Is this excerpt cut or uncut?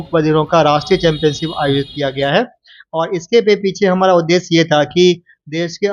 uncut